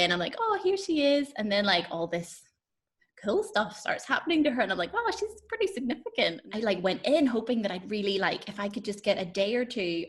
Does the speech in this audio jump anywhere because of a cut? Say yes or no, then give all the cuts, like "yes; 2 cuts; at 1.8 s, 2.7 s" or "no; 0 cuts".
yes; 1 cut; at 6.4 s